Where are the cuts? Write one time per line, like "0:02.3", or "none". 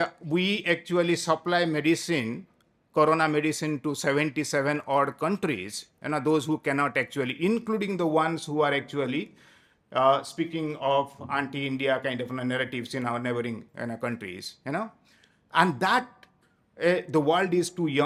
none